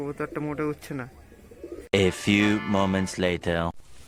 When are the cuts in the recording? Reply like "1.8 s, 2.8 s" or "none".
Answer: none